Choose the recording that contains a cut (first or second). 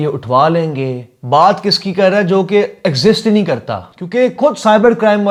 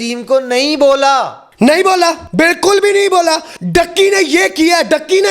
second